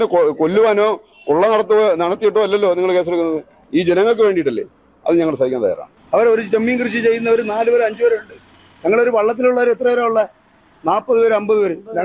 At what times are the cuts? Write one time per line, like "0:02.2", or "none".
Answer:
0:05.9